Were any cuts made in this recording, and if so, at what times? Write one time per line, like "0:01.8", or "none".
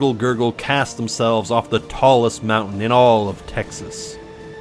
0:03.7